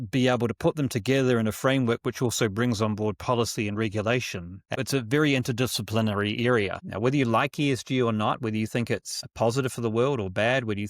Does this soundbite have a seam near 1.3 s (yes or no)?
no